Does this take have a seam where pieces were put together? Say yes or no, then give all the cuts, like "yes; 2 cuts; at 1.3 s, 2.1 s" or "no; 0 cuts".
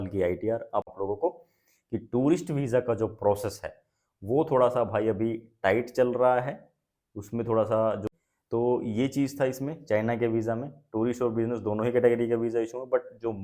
yes; 2 cuts; at 0.9 s, 8.1 s